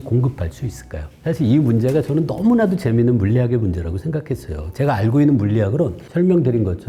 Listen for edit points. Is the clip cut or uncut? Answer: uncut